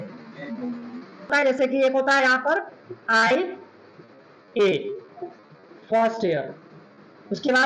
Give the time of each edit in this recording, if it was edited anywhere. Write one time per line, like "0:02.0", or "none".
0:01.3